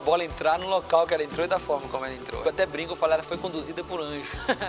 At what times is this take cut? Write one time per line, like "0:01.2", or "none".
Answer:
0:02.3